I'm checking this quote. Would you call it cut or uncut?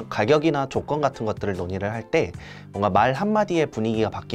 uncut